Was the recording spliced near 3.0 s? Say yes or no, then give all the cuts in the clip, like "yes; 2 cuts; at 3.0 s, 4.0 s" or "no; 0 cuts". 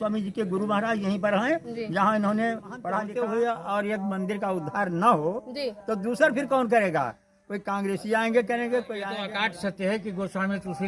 yes; 2 cuts; at 3.0 s, 9.2 s